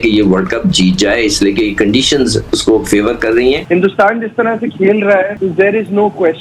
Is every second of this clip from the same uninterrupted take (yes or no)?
no